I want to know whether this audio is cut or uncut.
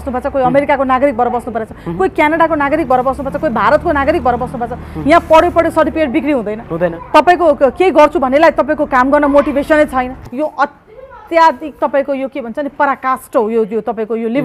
cut